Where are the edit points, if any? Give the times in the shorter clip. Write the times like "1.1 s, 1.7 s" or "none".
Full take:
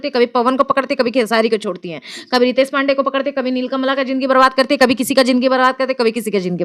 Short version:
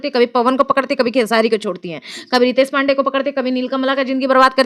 none